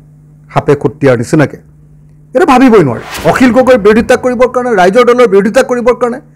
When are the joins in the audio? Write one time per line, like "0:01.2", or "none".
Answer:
0:03.1